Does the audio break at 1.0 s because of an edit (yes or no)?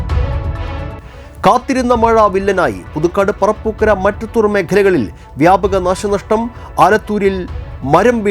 yes